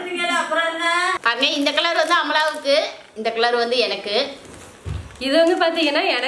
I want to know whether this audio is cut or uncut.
cut